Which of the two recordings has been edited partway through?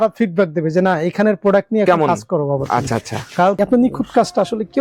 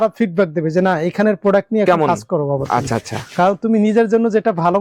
first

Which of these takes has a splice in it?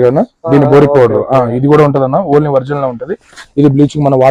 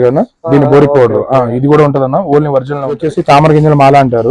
second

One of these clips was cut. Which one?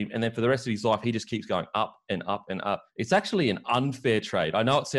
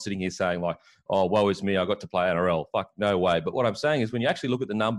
first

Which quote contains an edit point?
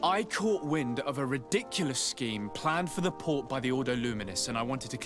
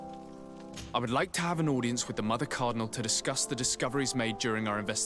second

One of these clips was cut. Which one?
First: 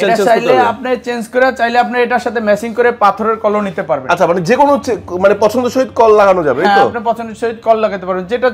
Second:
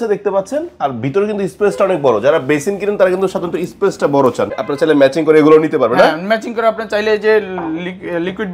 second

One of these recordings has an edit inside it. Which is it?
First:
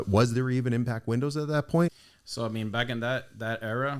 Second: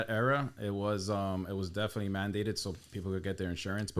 first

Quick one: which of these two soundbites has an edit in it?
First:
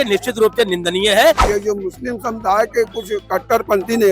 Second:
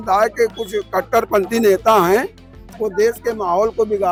first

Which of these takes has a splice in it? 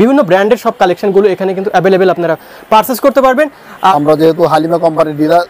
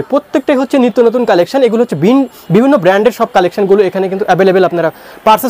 first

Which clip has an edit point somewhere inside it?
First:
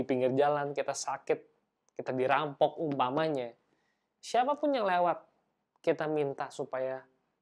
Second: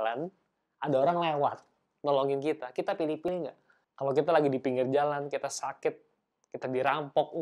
second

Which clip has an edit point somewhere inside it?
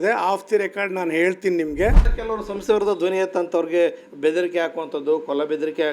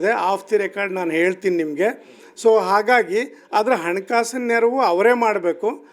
first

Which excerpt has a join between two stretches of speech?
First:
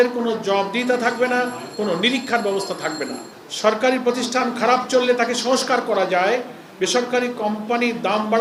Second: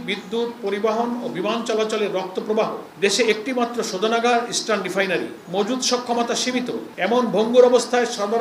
second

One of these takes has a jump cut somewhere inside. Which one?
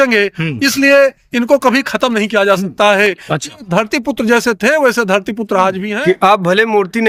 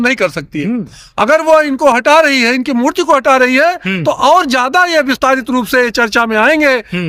first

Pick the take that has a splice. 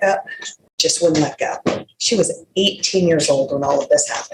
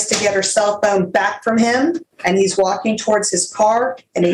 second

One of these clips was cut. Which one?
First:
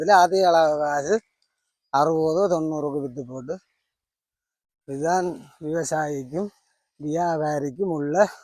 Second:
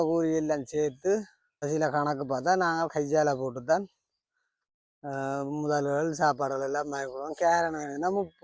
second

